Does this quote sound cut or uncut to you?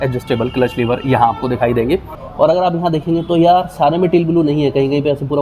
cut